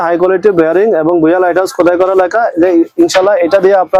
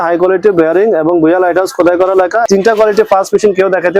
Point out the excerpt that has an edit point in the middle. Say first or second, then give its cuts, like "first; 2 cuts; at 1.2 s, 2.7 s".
second; 1 cut; at 2.5 s